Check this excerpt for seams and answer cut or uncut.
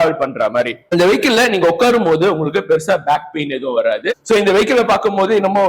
cut